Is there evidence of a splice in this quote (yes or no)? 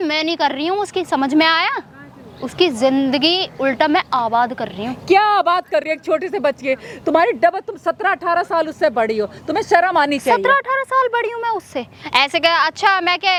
no